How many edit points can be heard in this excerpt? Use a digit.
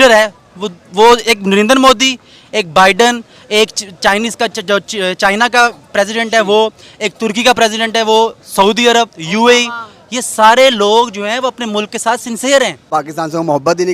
1